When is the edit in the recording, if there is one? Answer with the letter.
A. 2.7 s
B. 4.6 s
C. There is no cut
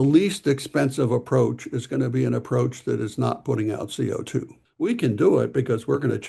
B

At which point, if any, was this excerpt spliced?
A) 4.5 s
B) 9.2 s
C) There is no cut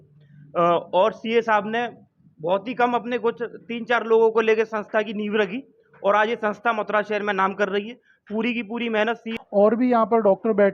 B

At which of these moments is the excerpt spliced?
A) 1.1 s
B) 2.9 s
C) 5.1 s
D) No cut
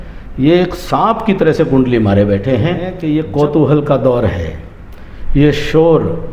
B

